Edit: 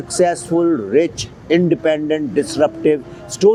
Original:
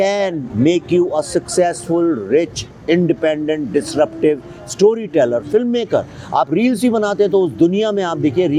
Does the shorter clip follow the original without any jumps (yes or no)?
yes